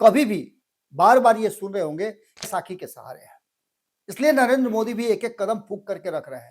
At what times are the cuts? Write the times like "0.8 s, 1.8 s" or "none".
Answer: 2.5 s